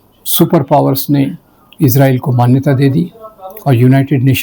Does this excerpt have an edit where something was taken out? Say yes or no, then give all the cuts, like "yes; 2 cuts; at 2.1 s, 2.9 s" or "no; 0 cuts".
no; 0 cuts